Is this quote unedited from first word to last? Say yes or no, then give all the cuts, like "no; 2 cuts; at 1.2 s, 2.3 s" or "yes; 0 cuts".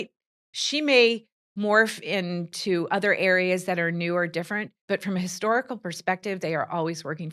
no; 1 cut; at 4.7 s